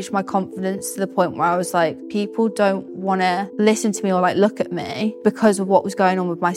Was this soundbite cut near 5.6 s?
no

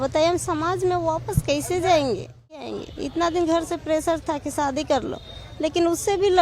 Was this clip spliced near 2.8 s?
yes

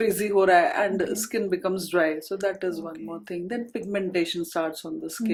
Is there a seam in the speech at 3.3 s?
no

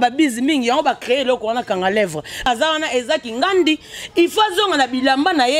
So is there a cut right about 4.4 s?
no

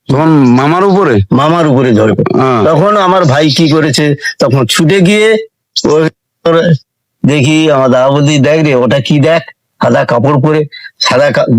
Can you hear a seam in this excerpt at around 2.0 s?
no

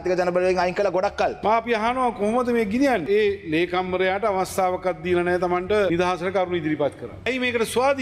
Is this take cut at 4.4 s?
no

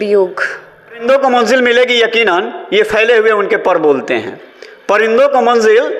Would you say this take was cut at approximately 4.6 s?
no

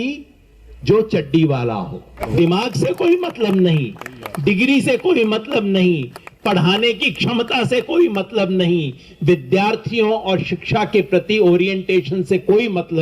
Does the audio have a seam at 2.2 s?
yes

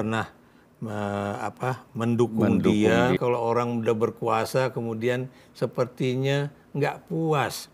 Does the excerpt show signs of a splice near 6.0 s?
no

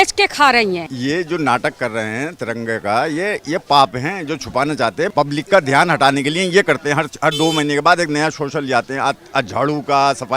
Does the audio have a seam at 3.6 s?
no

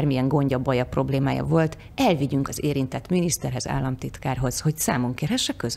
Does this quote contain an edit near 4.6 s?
no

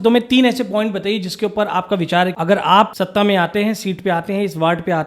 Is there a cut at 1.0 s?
no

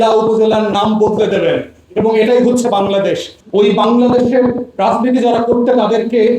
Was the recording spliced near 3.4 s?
yes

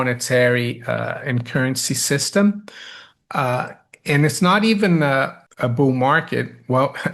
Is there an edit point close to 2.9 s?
no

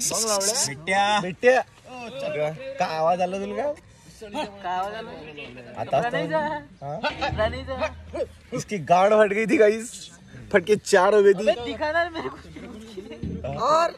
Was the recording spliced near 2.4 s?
no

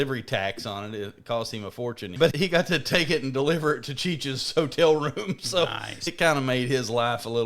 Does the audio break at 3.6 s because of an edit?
no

